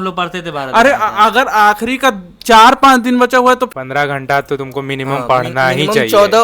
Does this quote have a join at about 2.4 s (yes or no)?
no